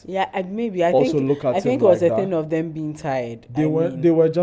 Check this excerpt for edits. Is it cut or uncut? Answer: uncut